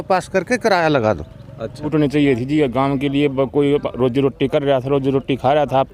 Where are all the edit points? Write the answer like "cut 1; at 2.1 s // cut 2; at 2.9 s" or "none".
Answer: cut 1; at 1.9 s